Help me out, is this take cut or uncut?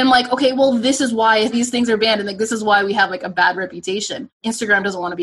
cut